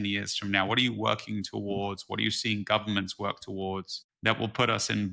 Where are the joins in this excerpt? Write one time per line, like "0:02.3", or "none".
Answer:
none